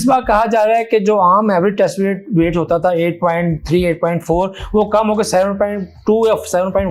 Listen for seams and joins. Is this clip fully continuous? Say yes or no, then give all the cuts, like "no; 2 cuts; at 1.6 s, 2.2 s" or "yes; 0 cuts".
yes; 0 cuts